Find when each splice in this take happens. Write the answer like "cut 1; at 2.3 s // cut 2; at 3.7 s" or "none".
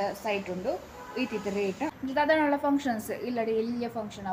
cut 1; at 2.0 s